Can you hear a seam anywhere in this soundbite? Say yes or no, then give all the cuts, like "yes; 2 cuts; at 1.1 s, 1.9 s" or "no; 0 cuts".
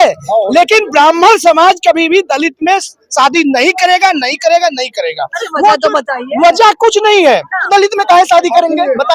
yes; 1 cut; at 7.6 s